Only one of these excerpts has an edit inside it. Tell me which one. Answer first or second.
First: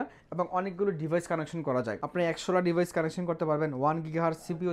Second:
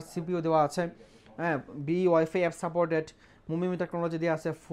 first